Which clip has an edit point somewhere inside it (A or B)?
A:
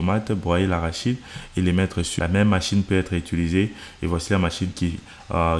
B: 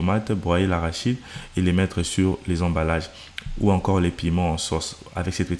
A